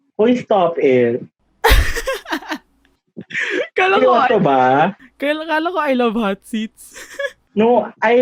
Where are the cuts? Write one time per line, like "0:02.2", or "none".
none